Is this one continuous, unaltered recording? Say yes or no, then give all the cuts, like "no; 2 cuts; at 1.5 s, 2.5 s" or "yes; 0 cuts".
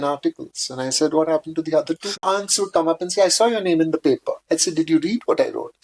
no; 1 cut; at 2.2 s